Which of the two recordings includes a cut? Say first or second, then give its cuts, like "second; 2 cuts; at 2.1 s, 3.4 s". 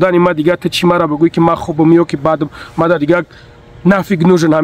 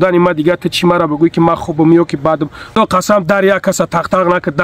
second; 1 cut; at 2.7 s